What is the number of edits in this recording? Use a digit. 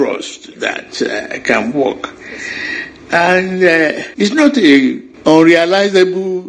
2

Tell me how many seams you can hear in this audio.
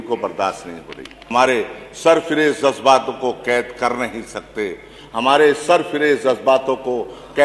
1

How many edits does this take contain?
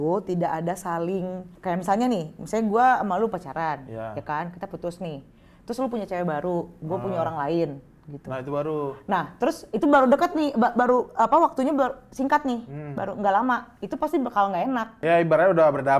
2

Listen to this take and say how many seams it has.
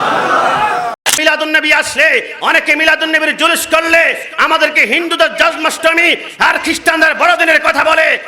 1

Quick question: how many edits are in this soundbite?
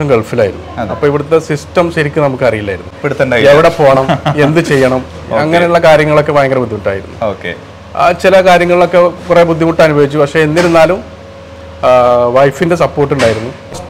0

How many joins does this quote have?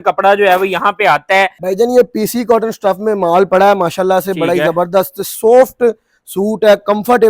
1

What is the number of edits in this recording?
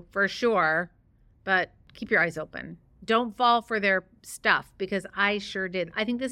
1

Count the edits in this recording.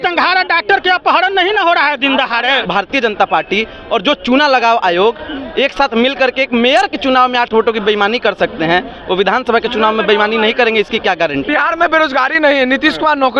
2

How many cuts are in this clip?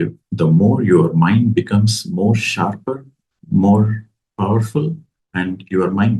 0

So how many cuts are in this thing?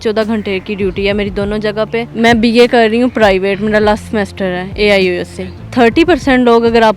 2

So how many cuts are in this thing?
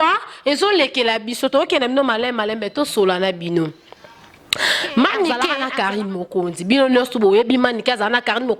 1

